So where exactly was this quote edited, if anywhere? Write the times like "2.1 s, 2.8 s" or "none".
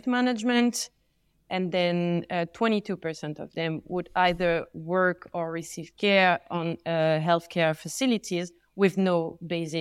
none

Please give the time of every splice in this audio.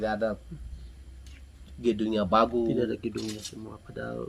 none

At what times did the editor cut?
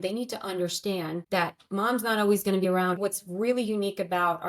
1.2 s, 2.8 s

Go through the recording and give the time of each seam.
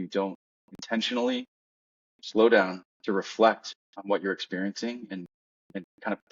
none

